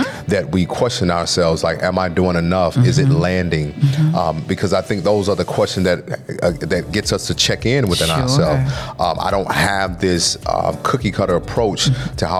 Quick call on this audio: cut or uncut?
uncut